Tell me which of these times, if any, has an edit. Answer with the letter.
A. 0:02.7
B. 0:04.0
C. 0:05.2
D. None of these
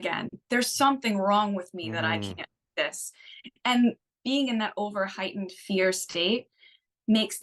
B